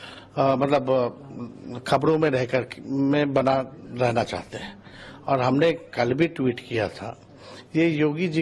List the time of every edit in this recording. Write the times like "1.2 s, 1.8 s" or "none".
3.0 s